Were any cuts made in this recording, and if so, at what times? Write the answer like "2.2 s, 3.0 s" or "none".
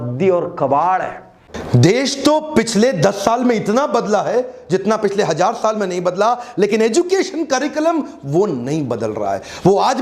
1.5 s

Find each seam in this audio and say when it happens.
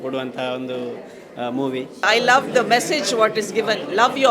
2.0 s

